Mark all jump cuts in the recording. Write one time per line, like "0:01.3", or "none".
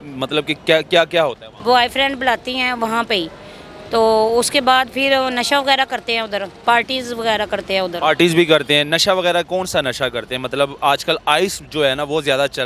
0:01.5
0:06.6